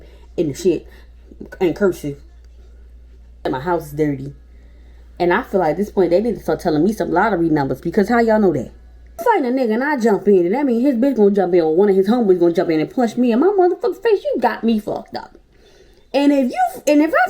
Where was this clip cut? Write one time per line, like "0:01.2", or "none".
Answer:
0:03.5
0:09.2